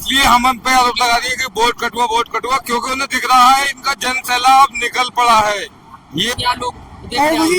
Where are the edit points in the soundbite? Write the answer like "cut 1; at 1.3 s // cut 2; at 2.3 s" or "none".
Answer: cut 1; at 6.3 s